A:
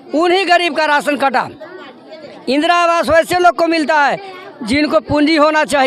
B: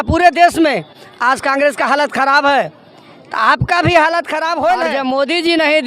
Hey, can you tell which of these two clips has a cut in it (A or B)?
B